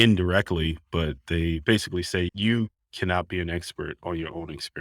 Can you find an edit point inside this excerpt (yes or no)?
yes